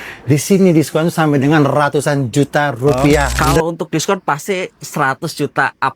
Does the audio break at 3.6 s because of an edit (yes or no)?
yes